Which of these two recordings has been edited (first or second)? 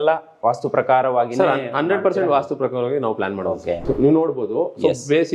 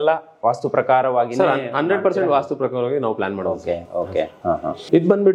first